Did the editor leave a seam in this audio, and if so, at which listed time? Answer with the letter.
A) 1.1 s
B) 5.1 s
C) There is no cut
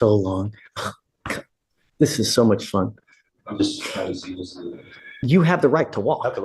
B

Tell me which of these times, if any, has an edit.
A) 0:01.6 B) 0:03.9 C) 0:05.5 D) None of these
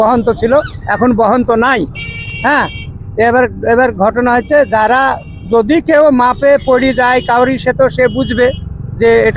D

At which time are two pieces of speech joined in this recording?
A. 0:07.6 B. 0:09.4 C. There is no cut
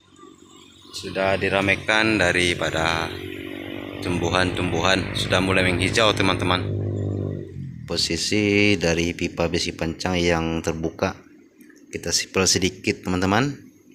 A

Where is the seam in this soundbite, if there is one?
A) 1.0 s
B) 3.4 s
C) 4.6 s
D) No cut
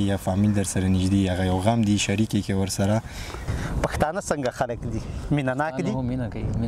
B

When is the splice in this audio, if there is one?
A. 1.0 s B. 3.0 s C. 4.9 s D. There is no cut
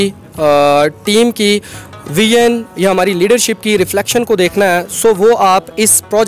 D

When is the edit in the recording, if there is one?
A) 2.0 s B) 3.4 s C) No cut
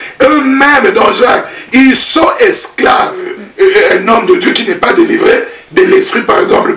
B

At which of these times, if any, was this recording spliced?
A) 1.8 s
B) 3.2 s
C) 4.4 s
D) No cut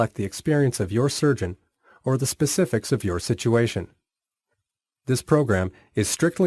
B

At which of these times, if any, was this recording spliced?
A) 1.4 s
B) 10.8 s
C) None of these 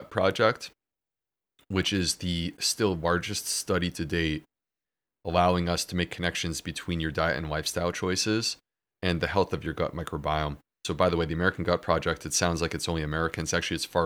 B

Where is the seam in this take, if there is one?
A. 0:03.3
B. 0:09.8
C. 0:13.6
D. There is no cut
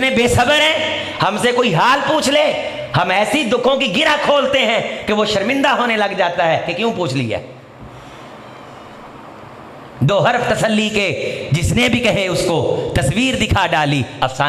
D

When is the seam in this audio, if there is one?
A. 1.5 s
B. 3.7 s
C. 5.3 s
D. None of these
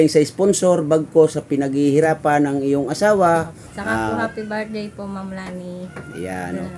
B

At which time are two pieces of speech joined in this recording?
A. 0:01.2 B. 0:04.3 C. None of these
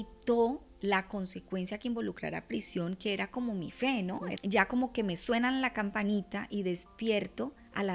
B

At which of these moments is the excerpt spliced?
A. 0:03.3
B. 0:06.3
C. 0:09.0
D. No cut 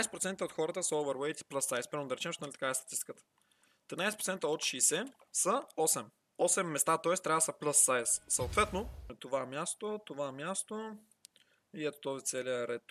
C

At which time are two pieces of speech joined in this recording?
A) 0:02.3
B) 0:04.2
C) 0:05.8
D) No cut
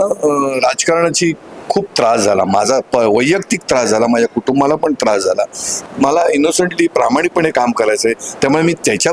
C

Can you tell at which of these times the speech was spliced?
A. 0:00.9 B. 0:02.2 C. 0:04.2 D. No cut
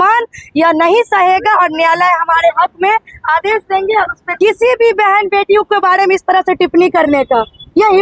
C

